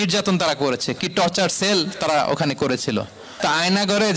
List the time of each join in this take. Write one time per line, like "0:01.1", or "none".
0:03.2